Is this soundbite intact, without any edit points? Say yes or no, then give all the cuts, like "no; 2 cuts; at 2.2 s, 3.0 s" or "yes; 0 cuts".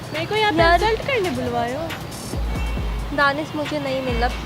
yes; 0 cuts